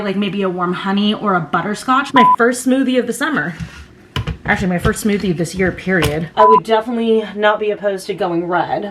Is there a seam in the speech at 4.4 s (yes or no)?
no